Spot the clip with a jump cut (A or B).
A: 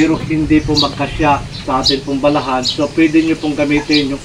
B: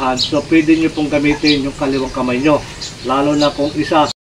A